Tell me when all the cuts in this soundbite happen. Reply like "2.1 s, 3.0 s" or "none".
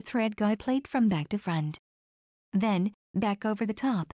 0.9 s, 2.4 s